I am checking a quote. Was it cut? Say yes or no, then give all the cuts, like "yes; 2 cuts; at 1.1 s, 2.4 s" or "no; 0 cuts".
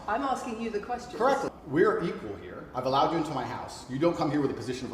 yes; 1 cut; at 1.5 s